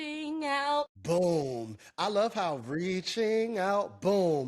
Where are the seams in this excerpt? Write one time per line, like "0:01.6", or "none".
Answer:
0:01.0